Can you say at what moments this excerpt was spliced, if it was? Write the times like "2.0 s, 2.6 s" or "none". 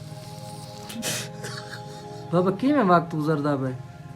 1.0 s